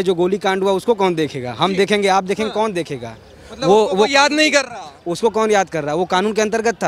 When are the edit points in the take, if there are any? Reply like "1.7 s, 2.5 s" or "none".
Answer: none